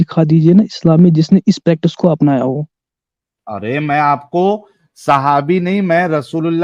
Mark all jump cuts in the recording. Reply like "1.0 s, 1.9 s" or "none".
none